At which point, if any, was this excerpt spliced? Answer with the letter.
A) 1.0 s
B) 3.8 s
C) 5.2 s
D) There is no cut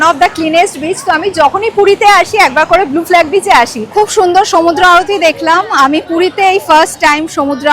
B